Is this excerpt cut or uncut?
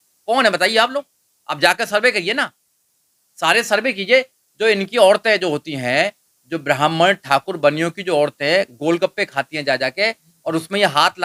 uncut